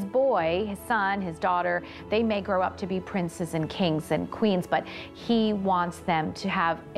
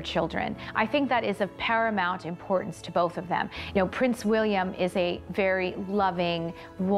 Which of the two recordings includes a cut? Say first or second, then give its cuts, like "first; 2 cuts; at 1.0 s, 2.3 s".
second; 1 cut; at 3.6 s